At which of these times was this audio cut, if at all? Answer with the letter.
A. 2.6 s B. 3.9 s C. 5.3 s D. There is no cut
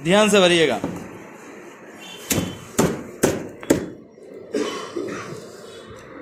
D